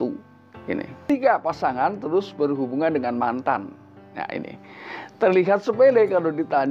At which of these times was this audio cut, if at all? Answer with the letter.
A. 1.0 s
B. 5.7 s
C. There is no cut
A